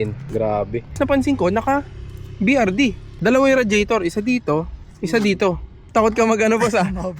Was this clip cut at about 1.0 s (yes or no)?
yes